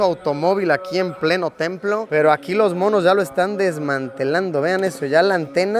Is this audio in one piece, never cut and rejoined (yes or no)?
yes